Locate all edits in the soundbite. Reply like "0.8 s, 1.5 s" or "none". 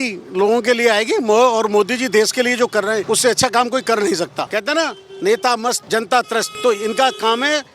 3.0 s, 4.4 s, 5.8 s, 6.5 s